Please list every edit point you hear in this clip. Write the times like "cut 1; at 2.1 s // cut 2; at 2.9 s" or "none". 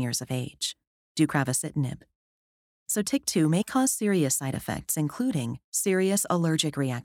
cut 1; at 1.0 s